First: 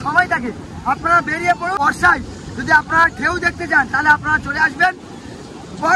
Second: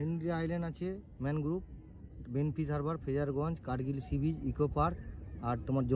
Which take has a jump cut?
first; 1 cut; at 1.8 s

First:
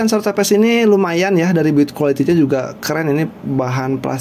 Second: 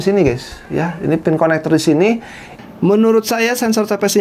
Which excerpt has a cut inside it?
second; 1 cut; at 2.4 s

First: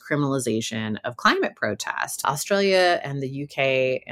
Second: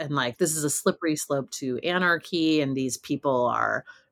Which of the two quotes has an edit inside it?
first; 1 cut; at 2.2 s

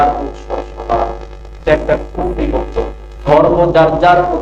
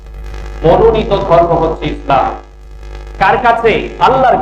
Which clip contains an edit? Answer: first; 2 cuts; at 1.6 s, 3.1 s

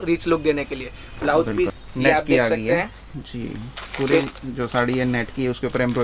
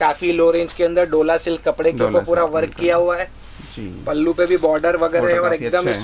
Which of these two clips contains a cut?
first; 1 cut; at 1.7 s

